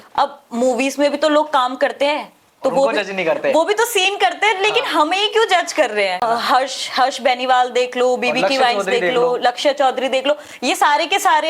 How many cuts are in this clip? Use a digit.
1